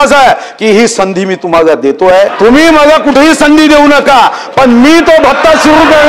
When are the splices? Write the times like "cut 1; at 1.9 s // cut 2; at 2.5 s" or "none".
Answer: cut 1; at 2.3 s